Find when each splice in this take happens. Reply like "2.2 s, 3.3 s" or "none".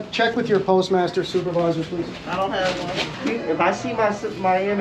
3.1 s

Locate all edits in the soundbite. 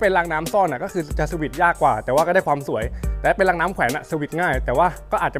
none

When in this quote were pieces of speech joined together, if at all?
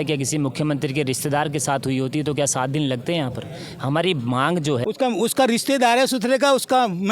4.8 s

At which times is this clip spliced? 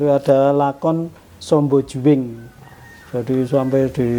none

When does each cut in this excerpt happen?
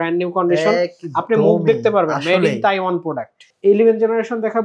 3.5 s

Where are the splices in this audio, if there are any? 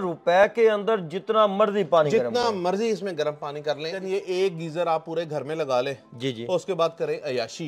4.0 s

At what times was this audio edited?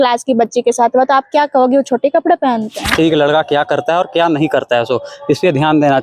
2.9 s

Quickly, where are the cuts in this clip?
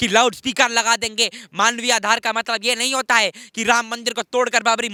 none

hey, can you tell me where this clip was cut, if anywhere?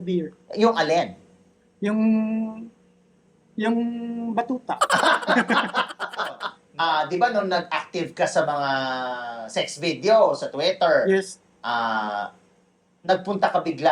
6.5 s

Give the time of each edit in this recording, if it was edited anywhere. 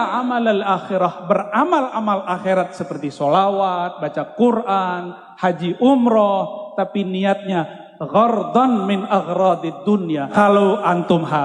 10.3 s

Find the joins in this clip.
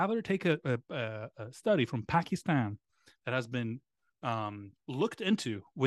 none

